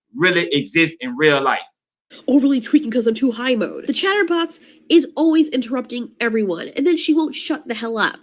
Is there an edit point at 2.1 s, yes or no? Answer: yes